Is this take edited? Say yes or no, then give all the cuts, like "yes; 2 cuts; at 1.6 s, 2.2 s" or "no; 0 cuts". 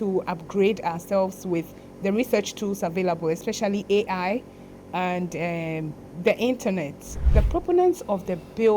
yes; 1 cut; at 7.3 s